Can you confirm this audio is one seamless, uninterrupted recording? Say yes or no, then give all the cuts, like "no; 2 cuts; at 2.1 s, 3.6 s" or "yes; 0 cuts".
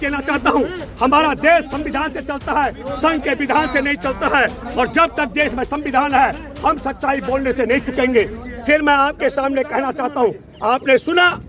yes; 0 cuts